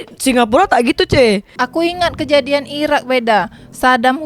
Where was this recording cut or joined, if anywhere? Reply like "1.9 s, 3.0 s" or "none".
1.6 s

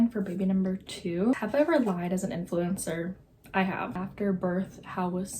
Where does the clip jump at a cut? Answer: 1.4 s, 3.9 s

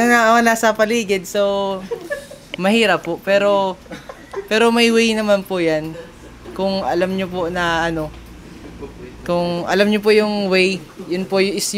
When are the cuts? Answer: none

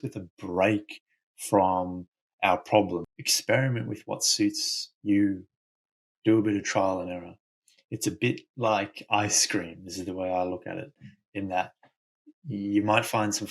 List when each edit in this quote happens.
3.1 s

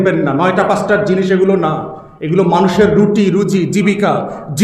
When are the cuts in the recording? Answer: none

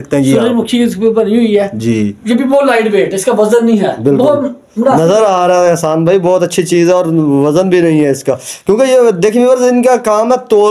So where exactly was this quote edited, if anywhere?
none

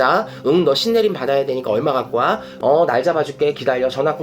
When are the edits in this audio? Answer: 2.5 s

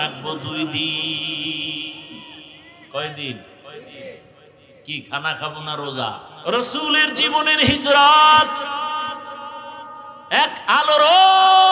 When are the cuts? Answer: 6.3 s

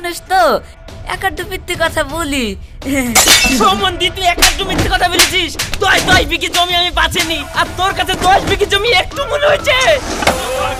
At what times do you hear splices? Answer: none

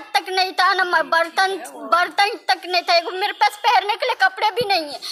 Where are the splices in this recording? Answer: none

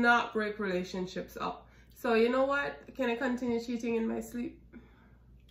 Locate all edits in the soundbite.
none

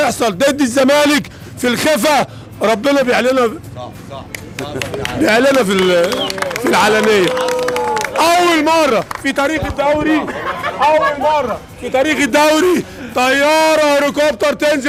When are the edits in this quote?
none

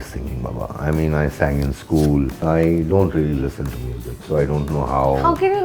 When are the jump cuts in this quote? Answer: 2.4 s

